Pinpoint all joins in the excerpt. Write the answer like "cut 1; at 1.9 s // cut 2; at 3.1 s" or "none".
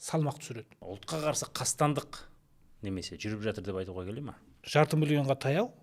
cut 1; at 0.8 s // cut 2; at 4.5 s